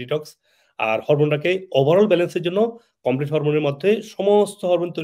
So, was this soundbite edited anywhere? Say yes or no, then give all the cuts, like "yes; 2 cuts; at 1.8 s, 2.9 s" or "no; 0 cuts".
no; 0 cuts